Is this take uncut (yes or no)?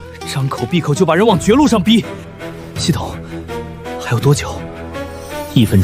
yes